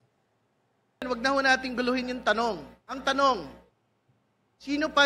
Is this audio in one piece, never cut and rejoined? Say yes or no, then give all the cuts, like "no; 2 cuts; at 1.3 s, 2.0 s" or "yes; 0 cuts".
no; 1 cut; at 1.1 s